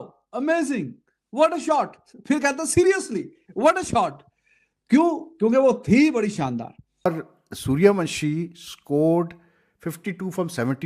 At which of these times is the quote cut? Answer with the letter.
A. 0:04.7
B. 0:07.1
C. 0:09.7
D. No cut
B